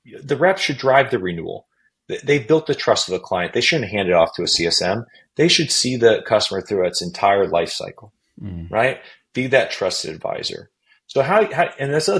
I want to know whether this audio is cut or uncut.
uncut